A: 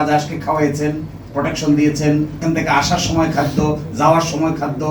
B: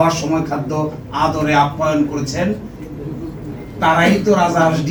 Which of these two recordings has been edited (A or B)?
A